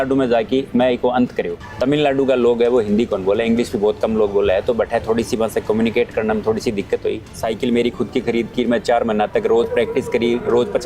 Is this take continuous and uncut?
no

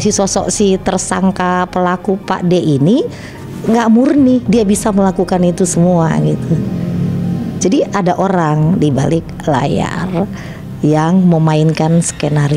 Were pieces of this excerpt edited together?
no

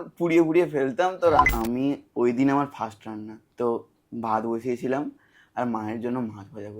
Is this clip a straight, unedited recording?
no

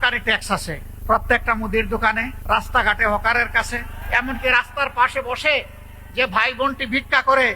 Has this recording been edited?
yes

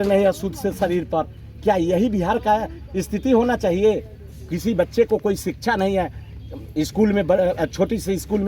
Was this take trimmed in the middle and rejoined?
no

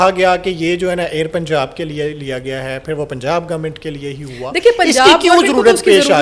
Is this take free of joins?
yes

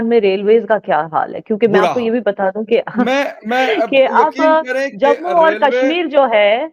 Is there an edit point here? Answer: no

